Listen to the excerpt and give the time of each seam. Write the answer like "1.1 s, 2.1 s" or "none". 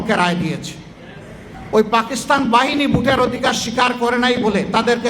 1.5 s